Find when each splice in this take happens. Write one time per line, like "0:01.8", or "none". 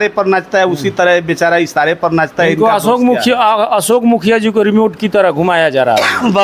none